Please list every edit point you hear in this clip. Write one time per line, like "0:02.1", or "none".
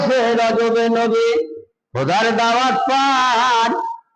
none